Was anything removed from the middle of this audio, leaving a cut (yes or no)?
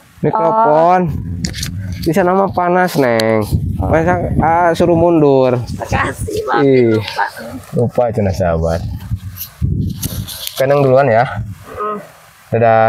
no